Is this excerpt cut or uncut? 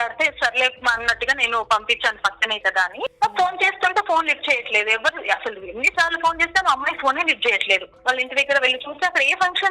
cut